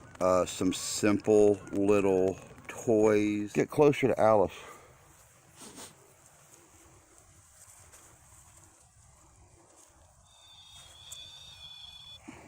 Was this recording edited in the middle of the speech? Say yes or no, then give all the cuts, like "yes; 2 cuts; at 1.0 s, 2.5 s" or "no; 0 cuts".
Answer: yes; 1 cut; at 3.4 s